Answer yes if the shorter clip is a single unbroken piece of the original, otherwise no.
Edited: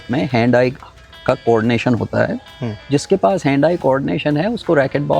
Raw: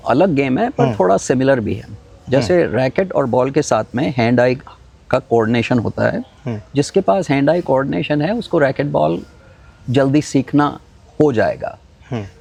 yes